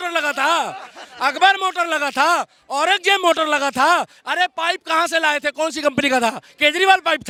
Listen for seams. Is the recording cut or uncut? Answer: uncut